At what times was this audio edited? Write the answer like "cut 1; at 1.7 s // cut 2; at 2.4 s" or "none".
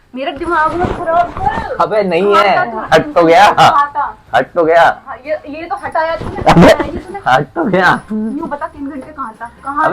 none